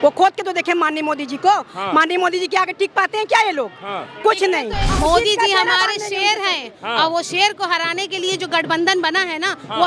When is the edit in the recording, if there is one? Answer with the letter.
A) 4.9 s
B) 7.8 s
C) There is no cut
A